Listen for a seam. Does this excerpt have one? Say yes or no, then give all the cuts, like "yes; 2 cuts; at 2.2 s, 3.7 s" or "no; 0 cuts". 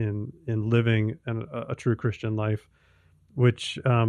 no; 0 cuts